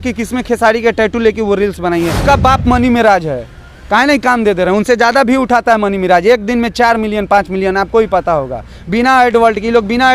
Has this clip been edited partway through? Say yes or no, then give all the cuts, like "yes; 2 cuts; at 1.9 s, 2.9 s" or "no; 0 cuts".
yes; 1 cut; at 2.2 s